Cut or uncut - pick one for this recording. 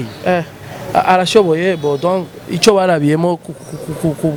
uncut